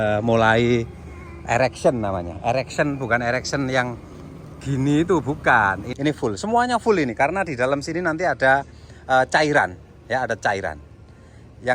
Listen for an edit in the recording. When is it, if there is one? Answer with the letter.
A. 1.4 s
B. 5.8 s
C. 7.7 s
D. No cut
B